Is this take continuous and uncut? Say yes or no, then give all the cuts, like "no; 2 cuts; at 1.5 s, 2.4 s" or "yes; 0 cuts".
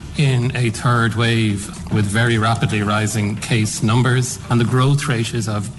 no; 2 cuts; at 1.8 s, 4.4 s